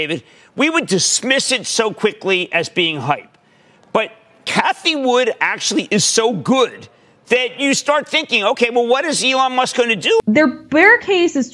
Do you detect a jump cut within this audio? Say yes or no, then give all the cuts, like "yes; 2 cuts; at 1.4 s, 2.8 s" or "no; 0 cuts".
yes; 1 cut; at 10.2 s